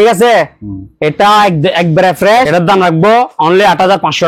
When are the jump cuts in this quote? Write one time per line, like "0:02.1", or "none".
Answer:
0:02.5